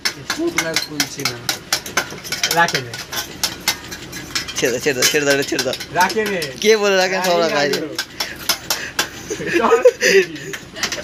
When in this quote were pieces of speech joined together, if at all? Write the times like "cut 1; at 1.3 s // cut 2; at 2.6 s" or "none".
none